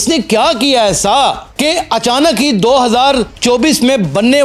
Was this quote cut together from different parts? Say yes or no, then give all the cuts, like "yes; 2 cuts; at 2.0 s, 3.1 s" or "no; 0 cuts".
no; 0 cuts